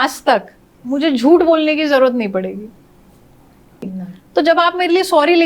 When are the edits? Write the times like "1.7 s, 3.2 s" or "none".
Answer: 3.9 s

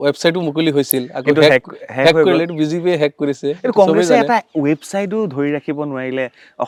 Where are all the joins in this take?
none

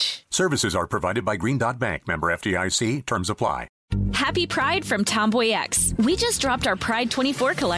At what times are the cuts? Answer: 3.8 s

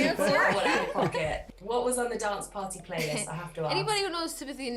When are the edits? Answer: 1.4 s

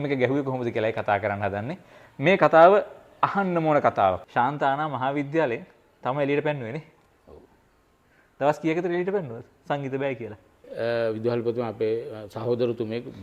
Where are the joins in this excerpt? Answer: 4.2 s, 10.6 s

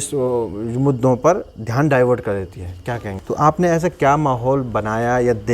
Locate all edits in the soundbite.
3.1 s

